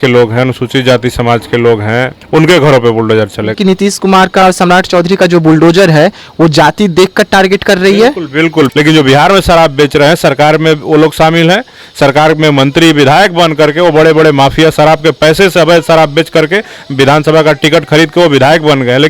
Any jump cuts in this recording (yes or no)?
yes